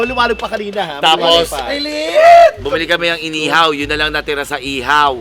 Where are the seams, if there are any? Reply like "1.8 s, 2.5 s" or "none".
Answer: none